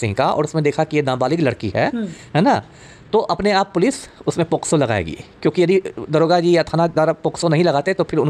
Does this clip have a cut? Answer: no; 0 cuts

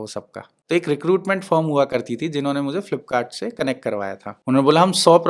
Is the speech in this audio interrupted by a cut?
yes; 1 cut; at 4.3 s

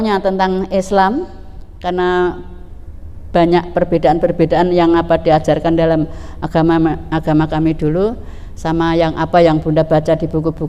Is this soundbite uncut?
yes; 0 cuts

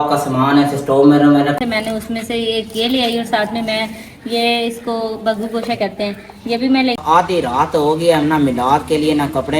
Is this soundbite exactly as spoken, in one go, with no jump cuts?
no; 2 cuts; at 1.6 s, 7.1 s

